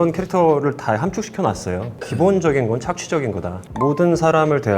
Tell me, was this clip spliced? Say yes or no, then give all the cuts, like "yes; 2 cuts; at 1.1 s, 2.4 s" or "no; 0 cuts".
yes; 2 cuts; at 2.0 s, 3.6 s